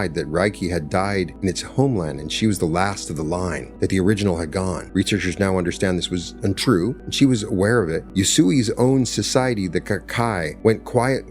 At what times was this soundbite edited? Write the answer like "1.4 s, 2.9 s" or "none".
1.3 s, 3.6 s, 4.8 s, 7.0 s, 8.0 s, 10.5 s